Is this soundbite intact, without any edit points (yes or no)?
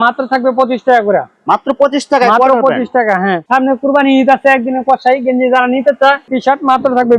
no